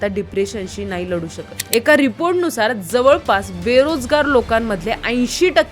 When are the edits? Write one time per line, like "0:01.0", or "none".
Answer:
0:01.6